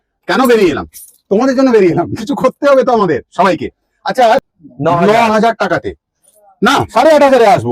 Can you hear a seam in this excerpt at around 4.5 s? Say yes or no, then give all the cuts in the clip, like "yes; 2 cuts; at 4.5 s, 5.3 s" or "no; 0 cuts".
yes; 1 cut; at 4.5 s